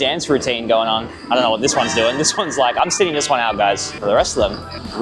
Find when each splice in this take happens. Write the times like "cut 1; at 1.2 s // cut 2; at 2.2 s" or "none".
none